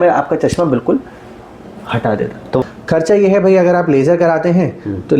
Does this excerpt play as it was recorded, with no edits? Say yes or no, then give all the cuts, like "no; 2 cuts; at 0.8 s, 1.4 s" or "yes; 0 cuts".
no; 1 cut; at 2.6 s